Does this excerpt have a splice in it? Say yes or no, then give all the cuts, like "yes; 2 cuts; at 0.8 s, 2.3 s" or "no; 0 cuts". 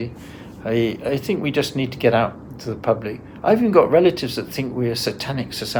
no; 0 cuts